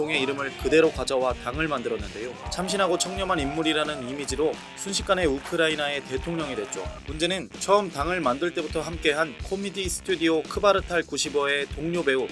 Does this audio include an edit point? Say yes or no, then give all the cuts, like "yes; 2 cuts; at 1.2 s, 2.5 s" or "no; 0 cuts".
yes; 2 cuts; at 2.4 s, 7.0 s